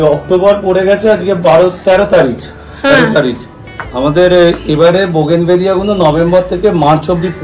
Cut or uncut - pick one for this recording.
uncut